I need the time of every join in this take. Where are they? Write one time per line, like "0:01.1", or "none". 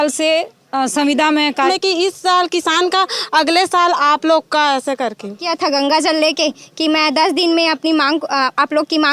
0:01.7
0:05.5